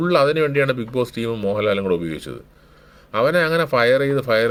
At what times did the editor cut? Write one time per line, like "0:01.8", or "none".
none